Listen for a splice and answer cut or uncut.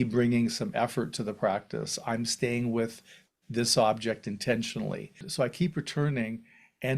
cut